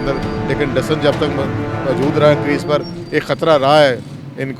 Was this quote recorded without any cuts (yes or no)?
yes